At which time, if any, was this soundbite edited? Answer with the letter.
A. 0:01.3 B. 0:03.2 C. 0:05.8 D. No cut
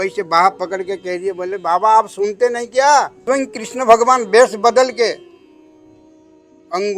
B